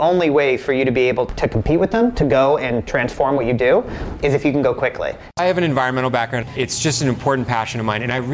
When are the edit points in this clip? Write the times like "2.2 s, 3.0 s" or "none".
5.4 s, 6.5 s